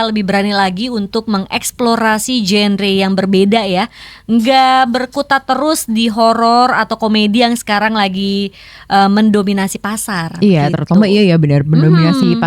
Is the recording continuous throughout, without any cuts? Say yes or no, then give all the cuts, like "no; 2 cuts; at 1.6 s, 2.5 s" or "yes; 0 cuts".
yes; 0 cuts